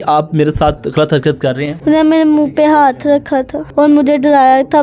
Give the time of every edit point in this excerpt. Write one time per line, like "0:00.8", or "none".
0:01.7
0:03.6